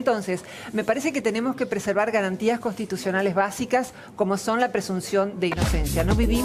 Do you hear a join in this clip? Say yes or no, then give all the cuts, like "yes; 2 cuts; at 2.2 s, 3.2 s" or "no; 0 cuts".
no; 0 cuts